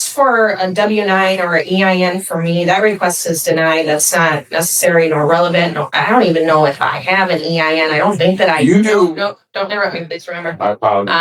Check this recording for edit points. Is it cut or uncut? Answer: uncut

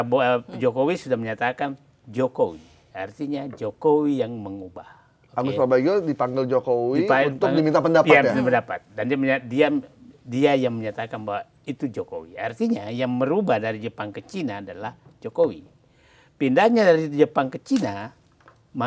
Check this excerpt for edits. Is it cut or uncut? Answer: uncut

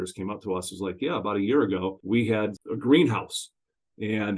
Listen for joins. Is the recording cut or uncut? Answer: cut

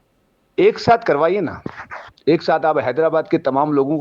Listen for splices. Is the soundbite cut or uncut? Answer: cut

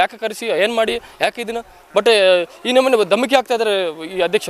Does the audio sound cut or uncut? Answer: uncut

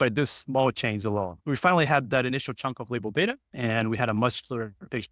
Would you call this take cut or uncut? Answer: cut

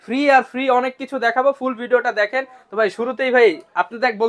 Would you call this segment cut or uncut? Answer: uncut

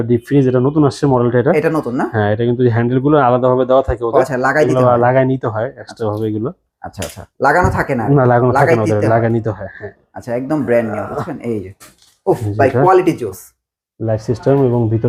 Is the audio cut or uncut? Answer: uncut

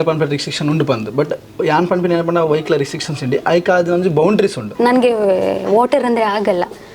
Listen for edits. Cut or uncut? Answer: cut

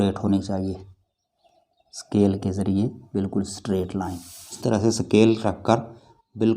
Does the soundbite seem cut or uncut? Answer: cut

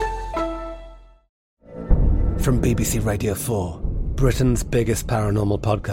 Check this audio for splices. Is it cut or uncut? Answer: cut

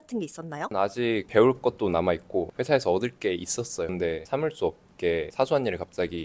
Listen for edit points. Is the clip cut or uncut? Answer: cut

